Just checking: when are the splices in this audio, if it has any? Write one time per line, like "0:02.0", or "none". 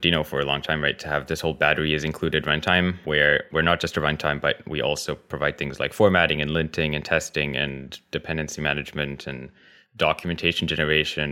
none